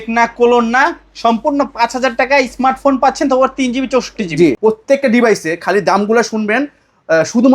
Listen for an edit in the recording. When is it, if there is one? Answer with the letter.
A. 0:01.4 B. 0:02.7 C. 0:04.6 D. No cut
C